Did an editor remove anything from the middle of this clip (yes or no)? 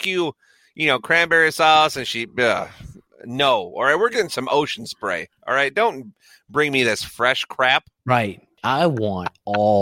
yes